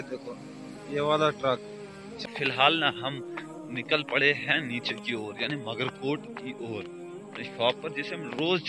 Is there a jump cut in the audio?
yes; 1 cut; at 2.1 s

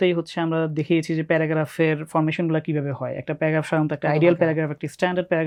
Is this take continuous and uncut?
yes; 0 cuts

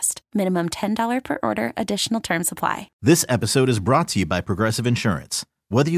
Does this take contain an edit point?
yes; 1 cut; at 2.9 s

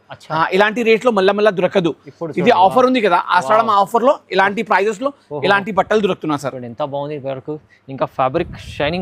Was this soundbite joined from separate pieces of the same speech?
no; 0 cuts

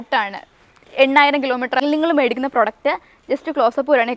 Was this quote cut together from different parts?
yes; 1 cut; at 1.8 s

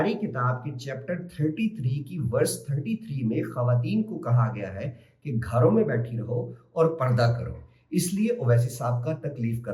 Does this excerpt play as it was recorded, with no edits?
yes; 0 cuts

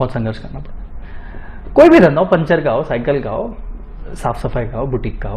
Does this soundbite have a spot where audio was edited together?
no; 0 cuts

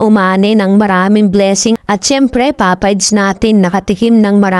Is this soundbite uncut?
no; 1 cut; at 1.8 s

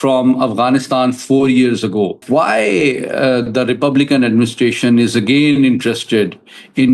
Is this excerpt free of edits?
no; 1 cut; at 2.2 s

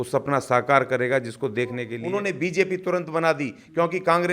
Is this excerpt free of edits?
no; 1 cut; at 2.0 s

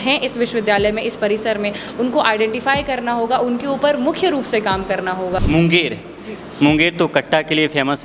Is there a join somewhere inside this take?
yes; 1 cut; at 5.4 s

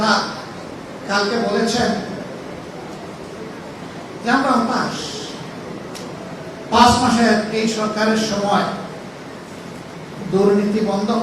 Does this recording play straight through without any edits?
yes; 0 cuts

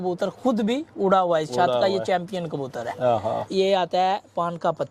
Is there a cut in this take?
yes; 1 cut; at 3.4 s

